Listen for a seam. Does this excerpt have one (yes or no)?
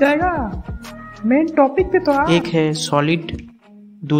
yes